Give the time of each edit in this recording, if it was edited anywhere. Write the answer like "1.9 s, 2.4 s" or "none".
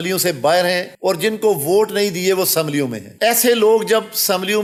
none